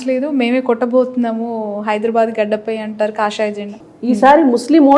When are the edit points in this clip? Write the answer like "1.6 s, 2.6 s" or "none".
3.9 s